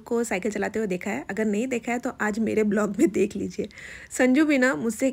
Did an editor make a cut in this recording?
no; 0 cuts

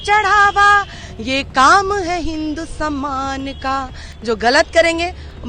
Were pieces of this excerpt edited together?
yes; 1 cut; at 4.0 s

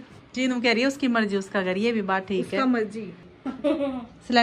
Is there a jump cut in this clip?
yes; 1 cut; at 3.3 s

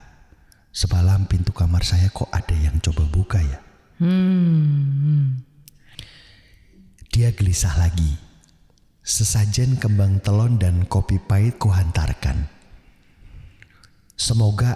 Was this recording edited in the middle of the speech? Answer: yes; 1 cut; at 5.4 s

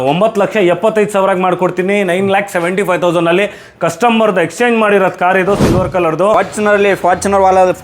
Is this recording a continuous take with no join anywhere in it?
no; 1 cut; at 6.3 s

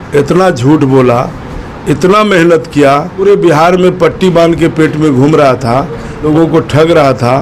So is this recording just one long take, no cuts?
no; 2 cuts; at 3.2 s, 6.3 s

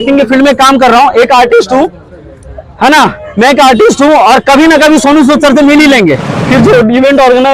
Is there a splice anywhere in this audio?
yes; 1 cut; at 6.3 s

